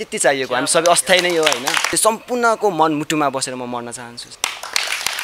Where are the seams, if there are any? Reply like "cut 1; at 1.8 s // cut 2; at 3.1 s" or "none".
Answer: cut 1; at 2.0 s // cut 2; at 4.3 s